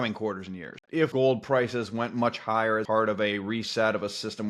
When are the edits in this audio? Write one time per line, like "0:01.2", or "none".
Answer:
0:01.0
0:02.8